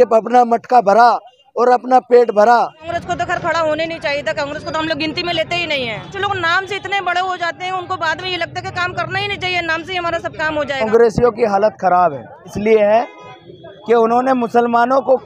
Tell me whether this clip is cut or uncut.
cut